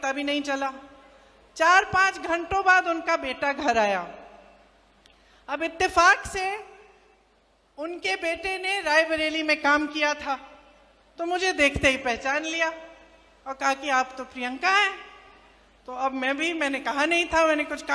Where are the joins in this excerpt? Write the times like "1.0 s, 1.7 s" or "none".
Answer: none